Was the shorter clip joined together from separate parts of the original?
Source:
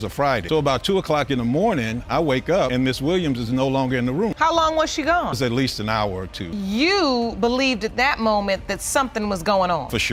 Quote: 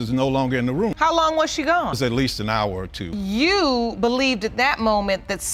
no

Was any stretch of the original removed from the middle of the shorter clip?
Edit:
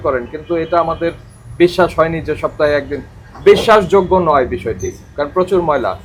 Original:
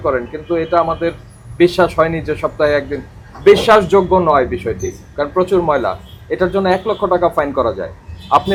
no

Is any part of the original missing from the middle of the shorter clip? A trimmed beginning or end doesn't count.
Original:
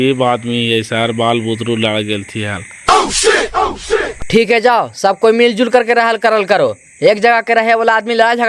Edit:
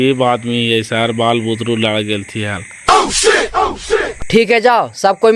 no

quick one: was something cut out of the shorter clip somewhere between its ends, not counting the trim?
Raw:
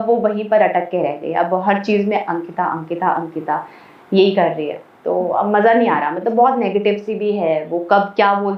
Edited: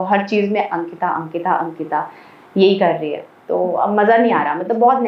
no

